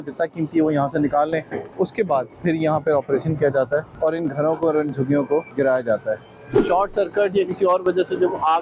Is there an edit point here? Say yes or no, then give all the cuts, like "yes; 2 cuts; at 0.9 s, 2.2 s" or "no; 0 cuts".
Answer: yes; 4 cuts; at 2.0 s, 3.9 s, 5.5 s, 6.7 s